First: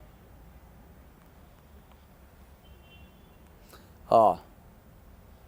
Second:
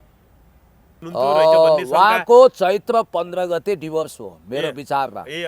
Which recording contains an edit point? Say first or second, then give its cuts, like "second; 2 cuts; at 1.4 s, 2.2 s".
second; 1 cut; at 1.0 s